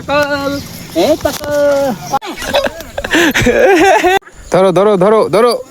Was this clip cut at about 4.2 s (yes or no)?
yes